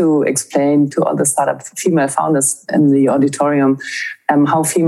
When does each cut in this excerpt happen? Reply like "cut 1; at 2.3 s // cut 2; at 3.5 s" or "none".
cut 1; at 0.9 s // cut 2; at 2.7 s